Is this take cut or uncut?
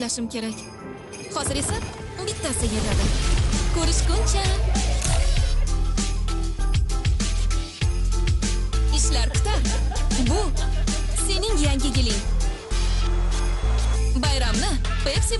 uncut